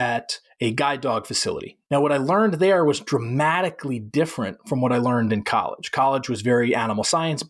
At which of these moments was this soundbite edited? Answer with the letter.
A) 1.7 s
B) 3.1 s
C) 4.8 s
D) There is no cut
A